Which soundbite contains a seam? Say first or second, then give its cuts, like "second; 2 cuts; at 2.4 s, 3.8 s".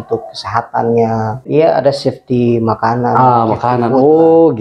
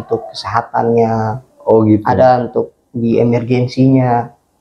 first; 1 cut; at 1.4 s